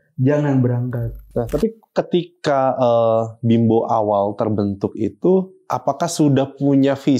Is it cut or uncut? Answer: cut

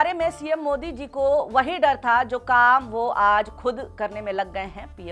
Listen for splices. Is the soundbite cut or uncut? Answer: uncut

